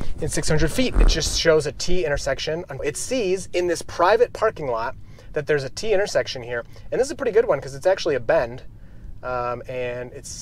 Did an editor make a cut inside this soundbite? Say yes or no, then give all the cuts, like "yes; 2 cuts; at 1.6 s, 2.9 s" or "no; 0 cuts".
no; 0 cuts